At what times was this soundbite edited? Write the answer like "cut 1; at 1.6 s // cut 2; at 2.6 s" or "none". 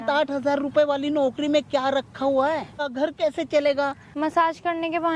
cut 1; at 2.8 s // cut 2; at 4.1 s